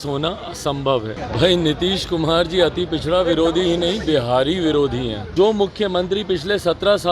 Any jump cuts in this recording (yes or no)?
yes